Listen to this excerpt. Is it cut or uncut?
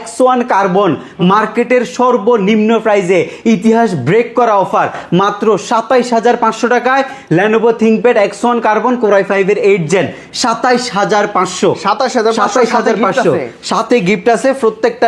uncut